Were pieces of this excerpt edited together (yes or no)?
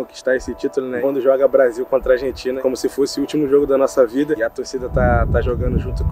yes